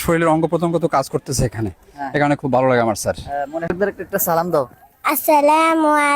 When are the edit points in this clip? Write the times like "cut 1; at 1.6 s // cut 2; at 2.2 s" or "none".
cut 1; at 3.7 s